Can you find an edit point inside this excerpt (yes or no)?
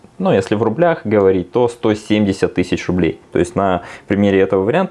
yes